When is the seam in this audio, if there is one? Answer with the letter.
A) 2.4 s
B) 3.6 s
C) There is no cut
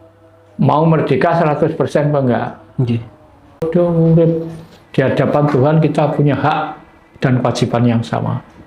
B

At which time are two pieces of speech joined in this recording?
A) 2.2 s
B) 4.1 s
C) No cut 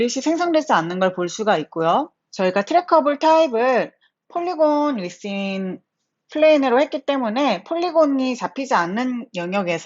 A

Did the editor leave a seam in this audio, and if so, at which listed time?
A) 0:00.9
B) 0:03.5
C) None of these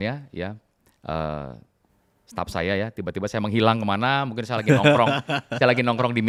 C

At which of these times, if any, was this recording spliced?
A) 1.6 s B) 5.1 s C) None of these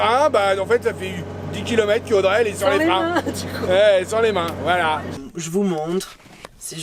B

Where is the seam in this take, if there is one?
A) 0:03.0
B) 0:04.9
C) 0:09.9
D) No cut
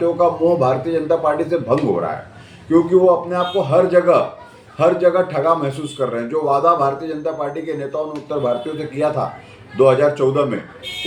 D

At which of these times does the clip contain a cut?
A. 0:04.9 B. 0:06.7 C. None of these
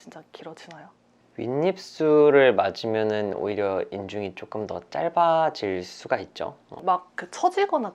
B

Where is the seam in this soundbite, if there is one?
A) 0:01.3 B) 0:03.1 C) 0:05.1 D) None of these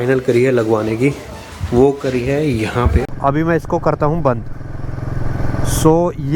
B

